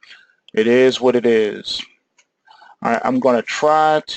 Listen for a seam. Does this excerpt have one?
yes; 1 cut; at 2.5 s

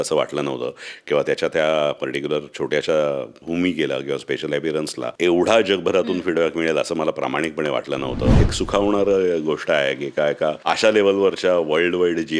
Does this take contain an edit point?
yes; 4 cuts; at 3.3 s, 5.1 s, 8.3 s, 10.6 s

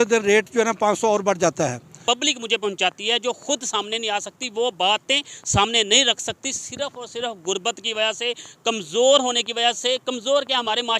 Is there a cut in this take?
yes; 1 cut; at 2.0 s

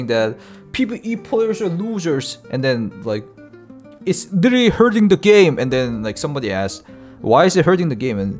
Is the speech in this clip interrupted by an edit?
no; 0 cuts

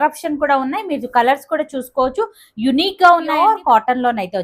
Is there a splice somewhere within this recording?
yes; 1 cut; at 3.4 s

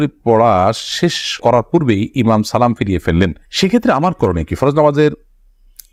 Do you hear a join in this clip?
no; 0 cuts

